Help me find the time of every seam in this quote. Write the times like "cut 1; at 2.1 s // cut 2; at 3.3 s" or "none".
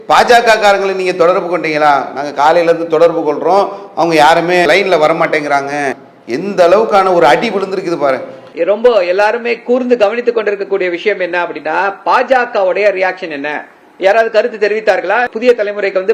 cut 1; at 4.6 s // cut 2; at 6.1 s // cut 3; at 8.4 s // cut 4; at 15.3 s